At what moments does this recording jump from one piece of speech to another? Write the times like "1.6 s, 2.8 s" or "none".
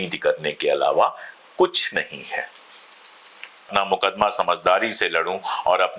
3.7 s